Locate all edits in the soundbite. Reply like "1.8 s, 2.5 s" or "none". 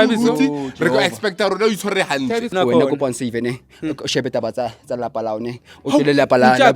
2.5 s